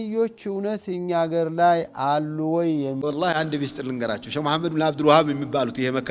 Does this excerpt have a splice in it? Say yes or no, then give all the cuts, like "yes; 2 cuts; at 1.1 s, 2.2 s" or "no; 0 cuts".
yes; 1 cut; at 3.0 s